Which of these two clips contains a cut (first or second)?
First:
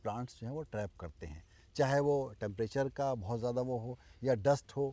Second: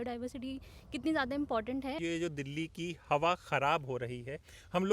second